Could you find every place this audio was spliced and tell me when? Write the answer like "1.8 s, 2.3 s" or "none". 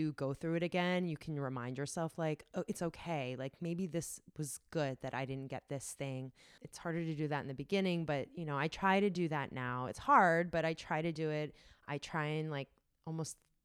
6.6 s